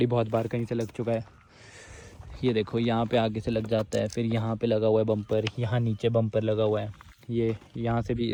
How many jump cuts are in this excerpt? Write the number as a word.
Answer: zero